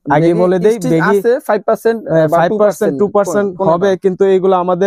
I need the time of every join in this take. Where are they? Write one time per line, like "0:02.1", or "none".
none